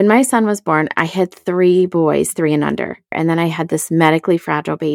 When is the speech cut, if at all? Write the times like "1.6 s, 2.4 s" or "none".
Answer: 3.1 s

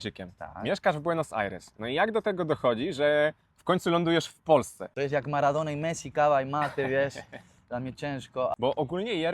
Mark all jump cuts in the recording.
4.8 s, 8.3 s

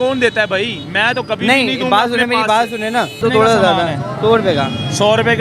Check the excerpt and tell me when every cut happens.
3.2 s

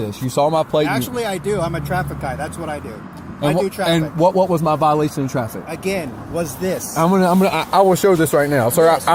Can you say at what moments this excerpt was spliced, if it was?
none

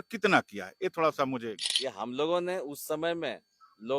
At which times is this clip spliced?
1.6 s

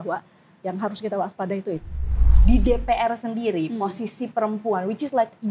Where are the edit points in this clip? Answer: 2.3 s

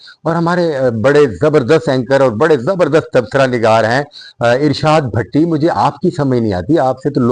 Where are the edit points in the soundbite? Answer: none

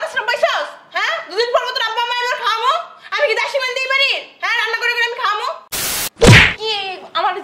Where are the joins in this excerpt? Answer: 5.6 s

